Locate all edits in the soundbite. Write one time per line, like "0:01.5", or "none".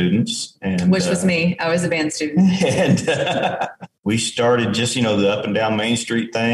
0:03.9